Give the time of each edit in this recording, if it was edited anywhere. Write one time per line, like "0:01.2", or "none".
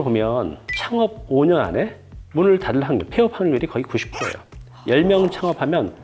none